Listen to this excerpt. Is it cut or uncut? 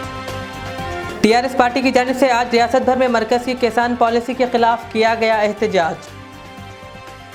uncut